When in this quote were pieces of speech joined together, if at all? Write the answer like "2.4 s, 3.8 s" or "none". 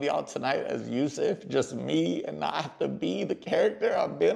none